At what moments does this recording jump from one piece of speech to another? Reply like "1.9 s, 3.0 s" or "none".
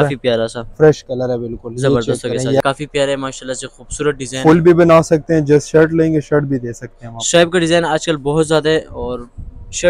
2.6 s